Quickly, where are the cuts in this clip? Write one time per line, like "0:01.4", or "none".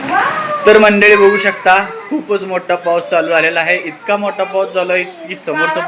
none